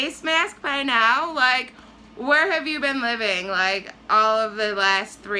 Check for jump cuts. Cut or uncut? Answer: uncut